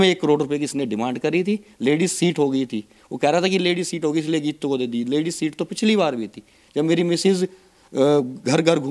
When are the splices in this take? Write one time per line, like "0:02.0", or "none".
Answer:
none